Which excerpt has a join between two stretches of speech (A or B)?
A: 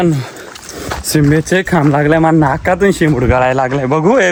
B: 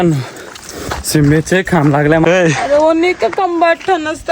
B